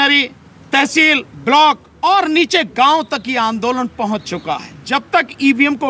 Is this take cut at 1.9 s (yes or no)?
yes